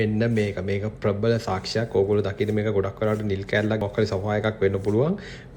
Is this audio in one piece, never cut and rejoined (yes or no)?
no